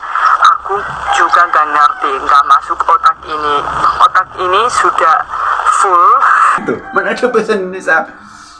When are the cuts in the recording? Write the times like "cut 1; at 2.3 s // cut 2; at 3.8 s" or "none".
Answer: cut 1; at 6.6 s